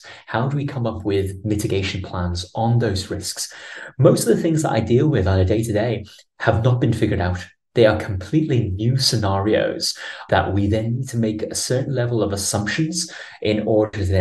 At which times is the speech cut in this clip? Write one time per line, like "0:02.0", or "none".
0:10.2